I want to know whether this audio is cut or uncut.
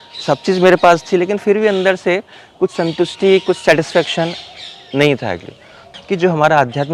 cut